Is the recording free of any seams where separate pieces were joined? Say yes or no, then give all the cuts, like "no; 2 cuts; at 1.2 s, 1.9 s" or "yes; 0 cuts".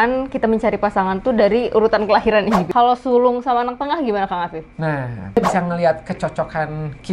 no; 2 cuts; at 2.7 s, 5.4 s